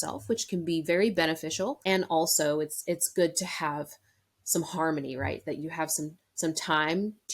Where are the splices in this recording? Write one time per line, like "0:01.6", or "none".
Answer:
0:01.8